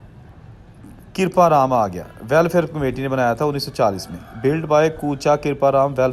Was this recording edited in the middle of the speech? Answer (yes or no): no